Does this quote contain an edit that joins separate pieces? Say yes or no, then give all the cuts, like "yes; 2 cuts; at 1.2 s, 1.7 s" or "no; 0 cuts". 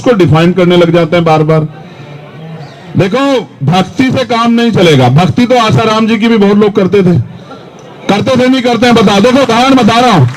no; 0 cuts